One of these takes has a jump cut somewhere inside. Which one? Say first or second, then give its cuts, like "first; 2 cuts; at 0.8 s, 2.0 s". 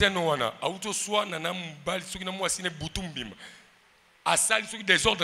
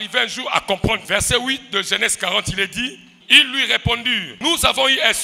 second; 3 cuts; at 1.0 s, 3.1 s, 4.3 s